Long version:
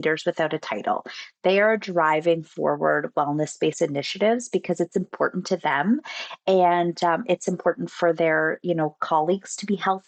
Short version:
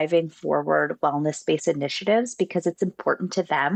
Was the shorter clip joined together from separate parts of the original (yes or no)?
no